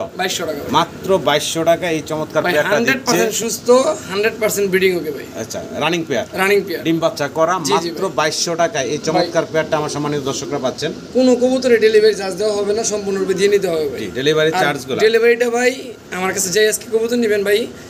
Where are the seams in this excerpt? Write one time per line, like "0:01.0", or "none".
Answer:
none